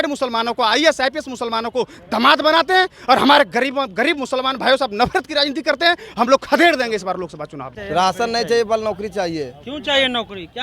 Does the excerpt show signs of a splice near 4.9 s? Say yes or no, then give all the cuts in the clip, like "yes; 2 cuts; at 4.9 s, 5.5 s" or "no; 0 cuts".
no; 1 cut; at 7.7 s